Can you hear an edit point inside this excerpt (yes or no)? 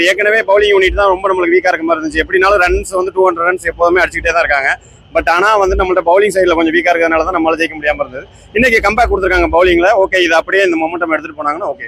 no